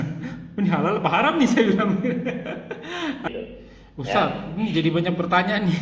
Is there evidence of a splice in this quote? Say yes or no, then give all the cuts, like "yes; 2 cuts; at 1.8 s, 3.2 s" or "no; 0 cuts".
yes; 1 cut; at 3.3 s